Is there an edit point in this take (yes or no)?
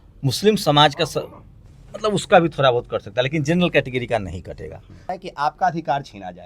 yes